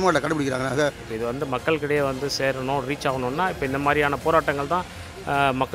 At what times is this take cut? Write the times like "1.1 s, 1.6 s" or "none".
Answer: 1.1 s